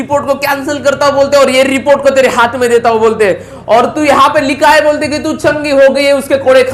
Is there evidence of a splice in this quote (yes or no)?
no